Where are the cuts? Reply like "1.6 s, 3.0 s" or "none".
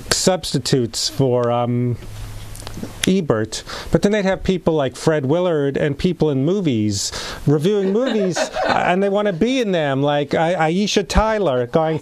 1.7 s